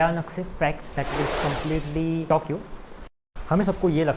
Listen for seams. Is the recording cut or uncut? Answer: cut